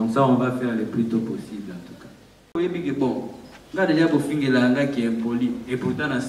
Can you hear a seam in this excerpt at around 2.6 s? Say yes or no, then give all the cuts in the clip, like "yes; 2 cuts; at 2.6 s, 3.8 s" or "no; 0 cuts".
yes; 1 cut; at 2.6 s